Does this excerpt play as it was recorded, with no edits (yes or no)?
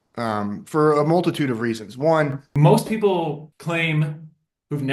no